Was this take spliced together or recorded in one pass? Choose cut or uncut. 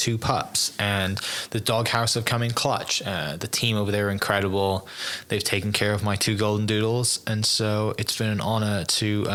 uncut